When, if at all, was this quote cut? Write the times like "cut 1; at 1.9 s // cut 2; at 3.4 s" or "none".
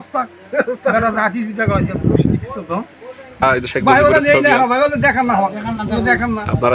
cut 1; at 3.4 s